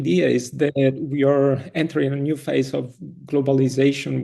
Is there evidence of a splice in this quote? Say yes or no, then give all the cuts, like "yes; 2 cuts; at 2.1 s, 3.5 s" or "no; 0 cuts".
no; 0 cuts